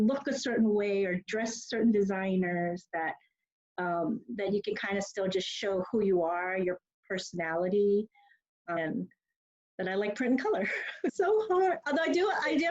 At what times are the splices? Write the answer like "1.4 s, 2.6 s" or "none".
8.8 s, 11.1 s